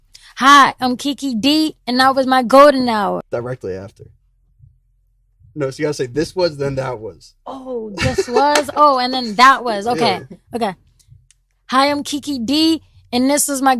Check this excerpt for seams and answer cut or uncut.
cut